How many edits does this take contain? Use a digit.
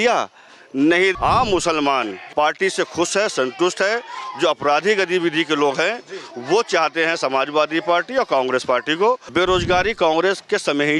3